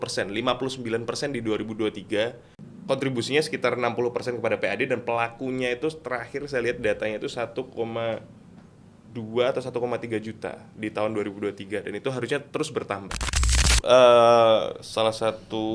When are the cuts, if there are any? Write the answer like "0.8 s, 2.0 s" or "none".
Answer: 2.5 s, 13.5 s